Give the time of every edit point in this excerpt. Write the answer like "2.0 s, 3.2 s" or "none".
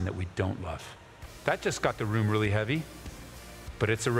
1.2 s